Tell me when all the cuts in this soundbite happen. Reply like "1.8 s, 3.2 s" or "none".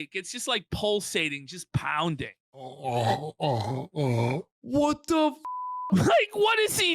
2.7 s, 4.5 s